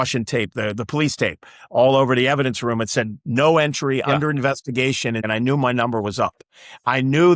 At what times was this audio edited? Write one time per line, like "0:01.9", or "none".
0:05.2